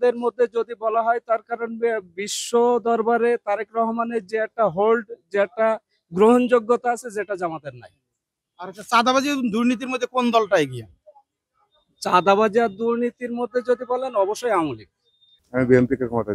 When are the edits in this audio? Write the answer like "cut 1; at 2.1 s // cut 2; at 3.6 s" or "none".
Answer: cut 1; at 15.3 s